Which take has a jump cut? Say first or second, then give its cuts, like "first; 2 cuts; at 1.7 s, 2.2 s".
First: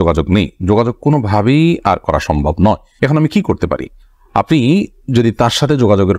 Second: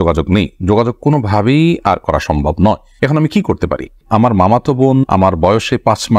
second; 1 cut; at 4.0 s